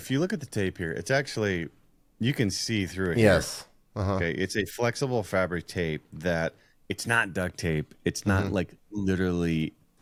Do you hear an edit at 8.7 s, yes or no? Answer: no